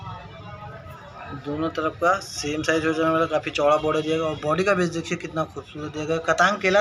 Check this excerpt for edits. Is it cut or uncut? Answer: uncut